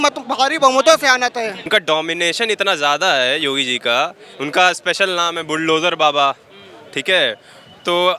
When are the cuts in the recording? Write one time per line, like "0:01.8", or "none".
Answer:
0:01.7